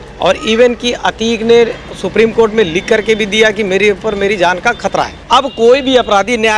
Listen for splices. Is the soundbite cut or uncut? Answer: cut